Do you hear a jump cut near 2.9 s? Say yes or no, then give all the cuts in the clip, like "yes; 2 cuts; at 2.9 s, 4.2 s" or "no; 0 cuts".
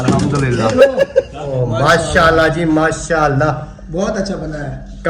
no; 1 cut; at 1.6 s